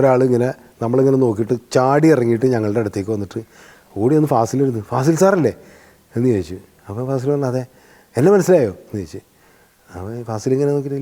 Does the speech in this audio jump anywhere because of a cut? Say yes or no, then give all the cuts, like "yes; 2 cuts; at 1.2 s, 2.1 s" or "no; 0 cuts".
no; 0 cuts